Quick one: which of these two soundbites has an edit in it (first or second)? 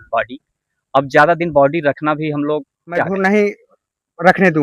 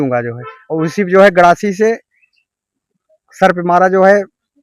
first